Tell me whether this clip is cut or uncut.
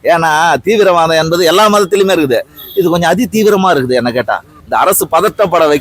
cut